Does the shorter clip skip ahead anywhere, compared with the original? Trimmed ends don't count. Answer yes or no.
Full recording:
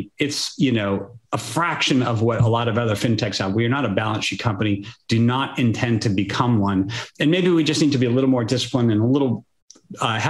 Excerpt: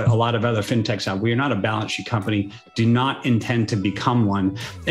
no